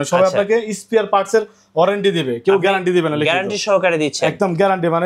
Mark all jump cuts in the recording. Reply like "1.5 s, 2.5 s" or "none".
none